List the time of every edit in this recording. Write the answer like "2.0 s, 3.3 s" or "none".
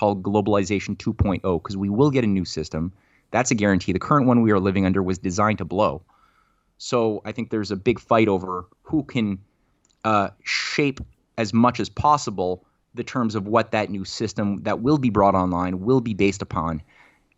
none